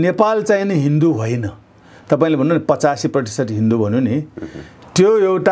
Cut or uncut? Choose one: uncut